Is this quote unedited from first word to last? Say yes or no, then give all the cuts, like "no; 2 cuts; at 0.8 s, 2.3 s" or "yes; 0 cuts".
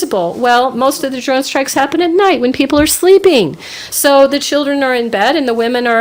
yes; 0 cuts